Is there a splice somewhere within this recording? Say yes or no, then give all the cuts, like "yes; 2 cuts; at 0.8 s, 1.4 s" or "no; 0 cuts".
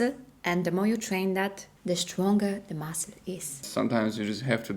yes; 2 cuts; at 1.7 s, 3.6 s